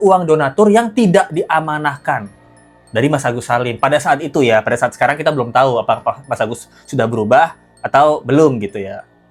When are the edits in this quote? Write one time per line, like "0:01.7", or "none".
none